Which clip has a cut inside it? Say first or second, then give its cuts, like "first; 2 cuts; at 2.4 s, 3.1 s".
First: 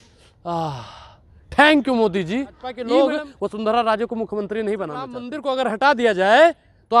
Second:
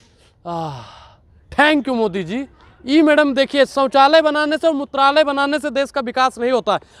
first; 2 cuts; at 2.7 s, 5.2 s